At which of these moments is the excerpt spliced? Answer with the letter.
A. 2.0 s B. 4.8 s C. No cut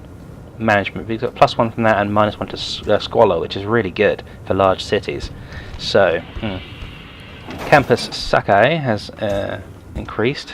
A